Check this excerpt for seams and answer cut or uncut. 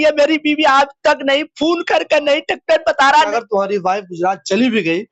cut